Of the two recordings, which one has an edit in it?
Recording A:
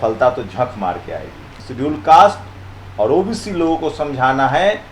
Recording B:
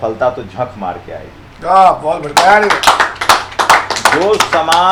A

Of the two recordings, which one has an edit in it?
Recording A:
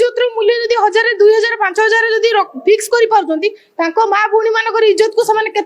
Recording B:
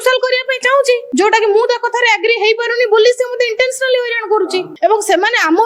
B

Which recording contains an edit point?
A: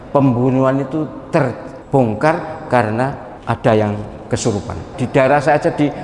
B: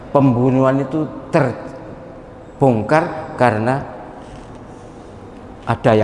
A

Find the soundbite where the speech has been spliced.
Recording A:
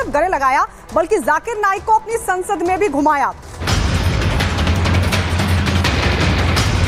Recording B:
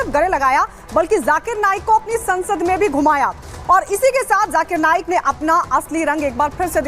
A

